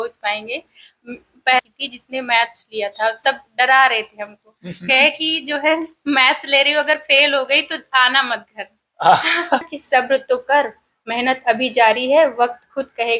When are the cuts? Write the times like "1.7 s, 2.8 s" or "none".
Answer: 1.6 s, 9.6 s